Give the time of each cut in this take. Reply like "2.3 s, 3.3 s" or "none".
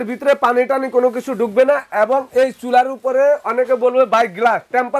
none